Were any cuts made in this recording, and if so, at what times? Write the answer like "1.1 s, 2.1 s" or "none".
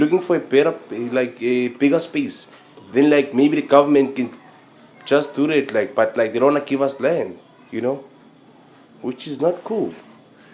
4.7 s